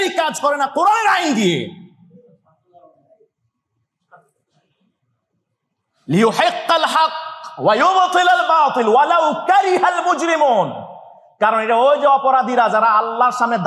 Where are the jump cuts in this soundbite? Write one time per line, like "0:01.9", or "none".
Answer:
none